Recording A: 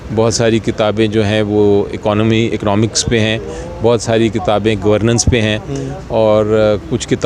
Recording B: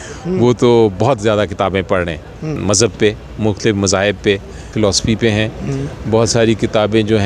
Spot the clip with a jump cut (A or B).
B